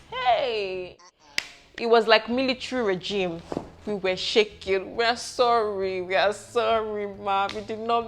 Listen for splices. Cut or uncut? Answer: cut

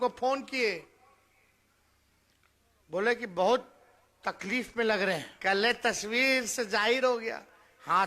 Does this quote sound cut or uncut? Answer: cut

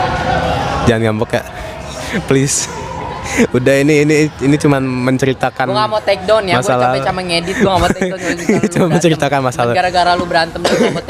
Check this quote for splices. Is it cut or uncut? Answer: uncut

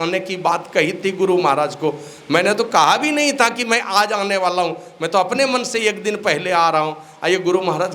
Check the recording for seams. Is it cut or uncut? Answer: uncut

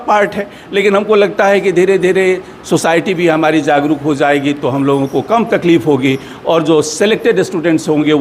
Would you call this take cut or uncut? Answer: uncut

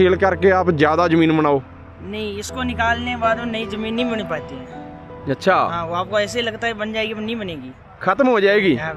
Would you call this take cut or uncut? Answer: uncut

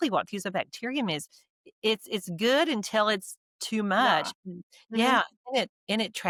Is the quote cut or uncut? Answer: uncut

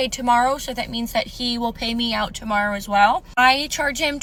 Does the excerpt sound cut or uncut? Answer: uncut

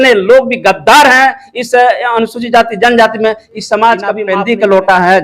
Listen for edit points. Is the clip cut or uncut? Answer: cut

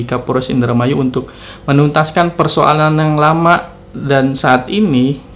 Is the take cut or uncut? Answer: uncut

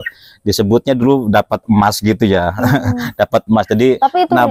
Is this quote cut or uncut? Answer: uncut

